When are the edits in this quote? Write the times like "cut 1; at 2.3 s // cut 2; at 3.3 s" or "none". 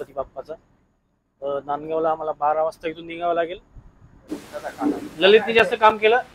cut 1; at 4.2 s